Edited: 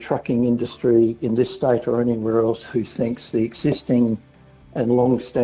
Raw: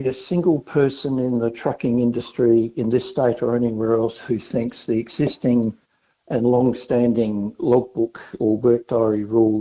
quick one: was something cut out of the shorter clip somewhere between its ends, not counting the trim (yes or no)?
no